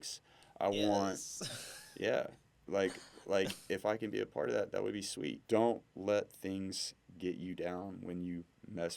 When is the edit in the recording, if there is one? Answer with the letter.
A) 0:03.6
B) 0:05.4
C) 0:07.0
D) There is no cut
B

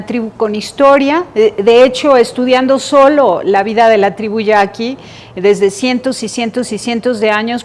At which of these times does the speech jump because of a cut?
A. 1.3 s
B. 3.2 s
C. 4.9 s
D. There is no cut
D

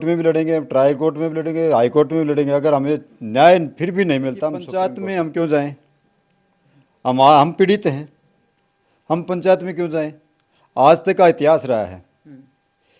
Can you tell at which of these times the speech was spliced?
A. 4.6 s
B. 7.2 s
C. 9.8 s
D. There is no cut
A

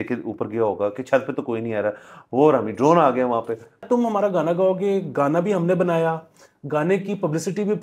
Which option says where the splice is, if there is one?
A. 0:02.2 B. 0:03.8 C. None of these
B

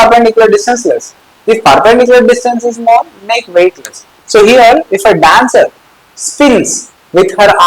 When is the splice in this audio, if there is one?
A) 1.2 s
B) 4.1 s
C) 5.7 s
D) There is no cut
B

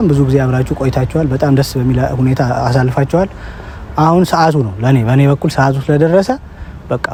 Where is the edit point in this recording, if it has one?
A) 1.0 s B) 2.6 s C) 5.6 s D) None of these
D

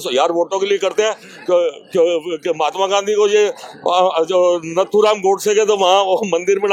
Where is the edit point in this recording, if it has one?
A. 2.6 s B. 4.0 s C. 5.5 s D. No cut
D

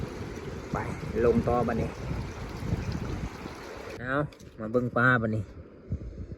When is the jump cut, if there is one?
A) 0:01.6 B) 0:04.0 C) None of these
B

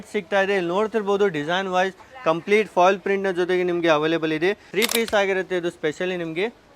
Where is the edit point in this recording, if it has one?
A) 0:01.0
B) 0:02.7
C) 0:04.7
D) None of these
C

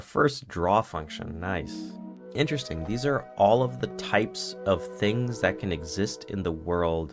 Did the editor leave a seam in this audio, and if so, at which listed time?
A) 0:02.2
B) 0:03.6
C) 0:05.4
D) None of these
A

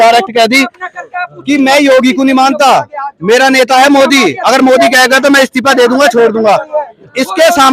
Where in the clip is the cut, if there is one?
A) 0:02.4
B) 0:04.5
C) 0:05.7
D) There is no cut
D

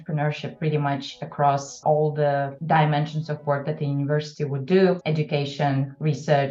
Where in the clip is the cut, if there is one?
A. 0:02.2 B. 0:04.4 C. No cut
C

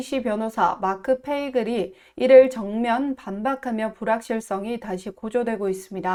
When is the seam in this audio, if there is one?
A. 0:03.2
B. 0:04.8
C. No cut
C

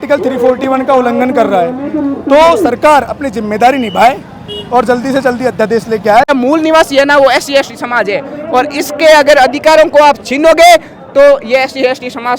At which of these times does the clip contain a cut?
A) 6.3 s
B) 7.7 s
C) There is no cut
A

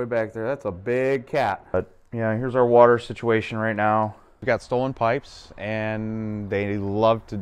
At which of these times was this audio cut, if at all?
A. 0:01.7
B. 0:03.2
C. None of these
A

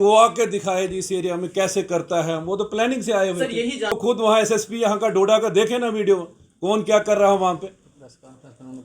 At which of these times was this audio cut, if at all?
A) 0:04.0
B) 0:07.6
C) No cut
A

